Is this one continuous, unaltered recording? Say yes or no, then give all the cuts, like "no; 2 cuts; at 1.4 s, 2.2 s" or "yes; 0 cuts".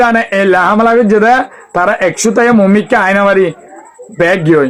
yes; 0 cuts